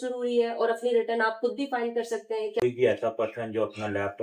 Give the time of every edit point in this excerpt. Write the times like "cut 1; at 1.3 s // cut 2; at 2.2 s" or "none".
cut 1; at 2.6 s

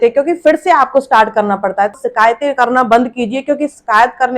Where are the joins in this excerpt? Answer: cut 1; at 1.9 s

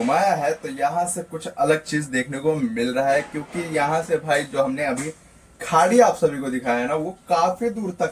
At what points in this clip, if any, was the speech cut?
none

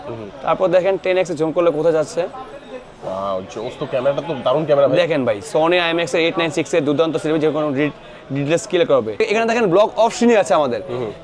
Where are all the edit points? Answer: cut 1; at 9.2 s

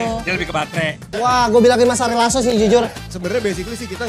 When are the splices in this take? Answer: cut 1; at 1.0 s // cut 2; at 2.9 s

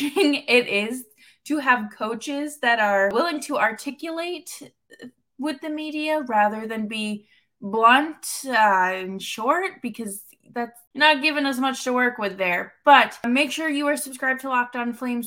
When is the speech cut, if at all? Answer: cut 1; at 3.1 s // cut 2; at 10.8 s // cut 3; at 13.3 s

